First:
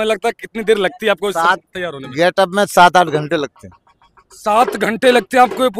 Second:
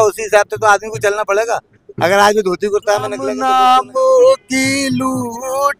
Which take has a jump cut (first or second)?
second